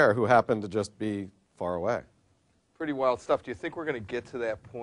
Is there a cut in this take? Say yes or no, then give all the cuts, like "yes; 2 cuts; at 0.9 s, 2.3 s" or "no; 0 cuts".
no; 0 cuts